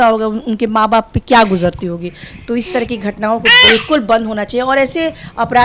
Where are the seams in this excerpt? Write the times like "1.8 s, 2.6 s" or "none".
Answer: none